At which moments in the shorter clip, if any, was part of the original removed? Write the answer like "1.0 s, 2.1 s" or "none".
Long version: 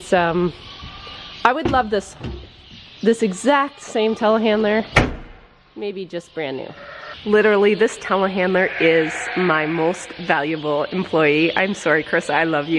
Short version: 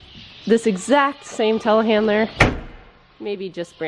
none